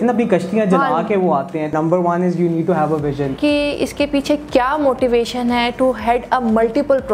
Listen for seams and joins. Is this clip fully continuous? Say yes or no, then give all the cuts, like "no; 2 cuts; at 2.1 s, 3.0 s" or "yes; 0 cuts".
no; 2 cuts; at 1.7 s, 3.3 s